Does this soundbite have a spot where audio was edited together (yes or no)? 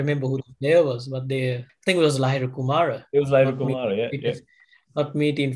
yes